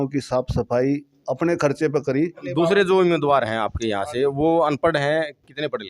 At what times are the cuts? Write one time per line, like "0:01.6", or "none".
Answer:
0:02.4